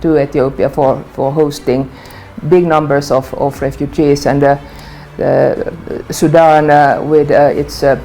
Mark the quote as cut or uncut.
uncut